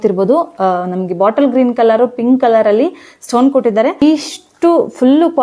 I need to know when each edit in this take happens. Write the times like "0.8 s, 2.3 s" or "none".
4.0 s